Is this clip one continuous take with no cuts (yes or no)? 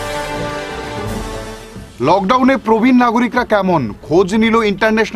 no